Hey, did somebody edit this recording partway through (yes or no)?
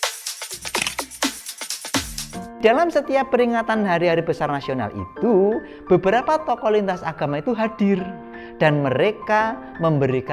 yes